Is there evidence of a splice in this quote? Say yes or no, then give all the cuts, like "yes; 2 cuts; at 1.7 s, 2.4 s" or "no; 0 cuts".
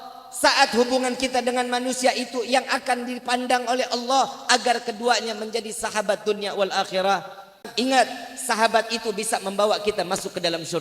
yes; 1 cut; at 7.6 s